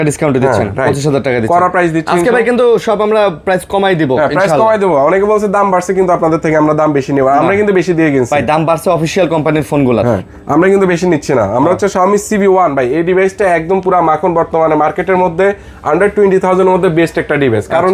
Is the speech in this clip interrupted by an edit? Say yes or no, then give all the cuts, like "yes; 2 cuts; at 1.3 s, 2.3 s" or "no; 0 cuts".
no; 0 cuts